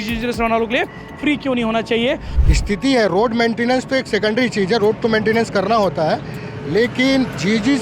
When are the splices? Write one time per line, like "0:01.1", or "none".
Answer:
0:02.3